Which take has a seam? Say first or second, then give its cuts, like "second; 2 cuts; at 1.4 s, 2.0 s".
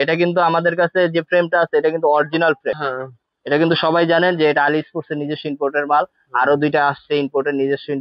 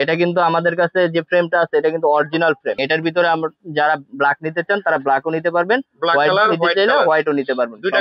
first; 1 cut; at 2.8 s